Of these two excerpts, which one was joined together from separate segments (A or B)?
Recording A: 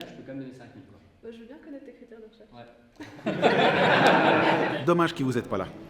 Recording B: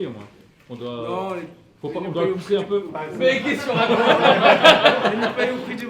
A